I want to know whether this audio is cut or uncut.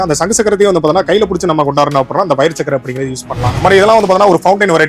cut